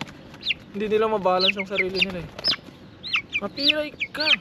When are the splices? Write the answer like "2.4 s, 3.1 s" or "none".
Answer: none